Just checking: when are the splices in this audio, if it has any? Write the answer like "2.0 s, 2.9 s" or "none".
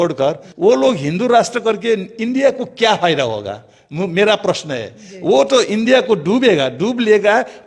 none